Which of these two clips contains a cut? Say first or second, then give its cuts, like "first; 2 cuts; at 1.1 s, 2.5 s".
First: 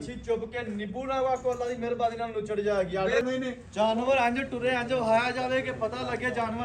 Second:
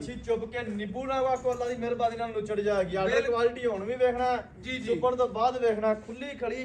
first; 1 cut; at 3.2 s